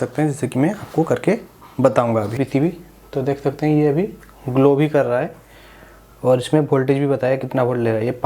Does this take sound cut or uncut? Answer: cut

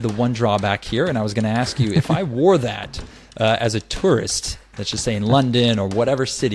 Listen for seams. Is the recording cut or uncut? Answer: uncut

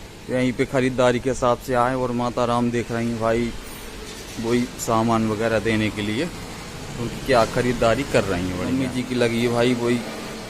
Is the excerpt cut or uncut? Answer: cut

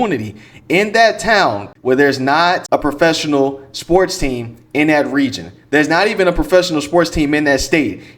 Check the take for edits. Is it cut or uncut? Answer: cut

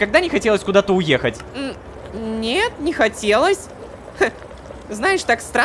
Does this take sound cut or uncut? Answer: uncut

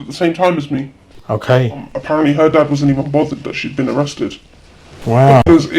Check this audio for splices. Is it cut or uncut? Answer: cut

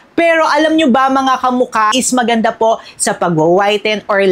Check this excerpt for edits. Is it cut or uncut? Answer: cut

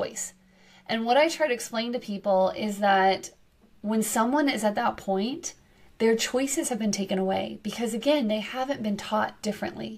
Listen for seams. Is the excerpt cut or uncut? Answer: uncut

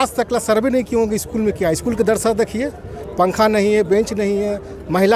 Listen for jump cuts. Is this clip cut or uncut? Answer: uncut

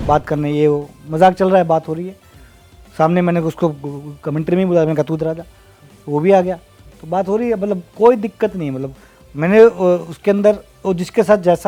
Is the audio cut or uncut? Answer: uncut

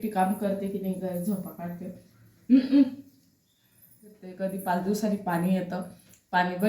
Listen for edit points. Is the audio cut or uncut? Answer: cut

